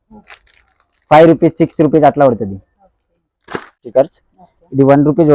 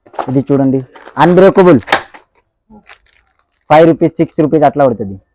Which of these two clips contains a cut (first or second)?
first